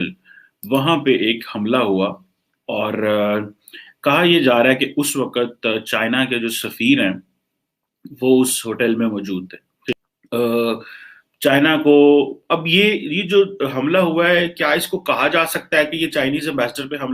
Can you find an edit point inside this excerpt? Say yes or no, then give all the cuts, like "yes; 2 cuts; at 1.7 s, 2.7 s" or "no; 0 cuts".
yes; 1 cut; at 9.9 s